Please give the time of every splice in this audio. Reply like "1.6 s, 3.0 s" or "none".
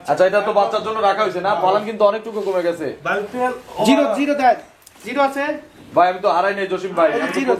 none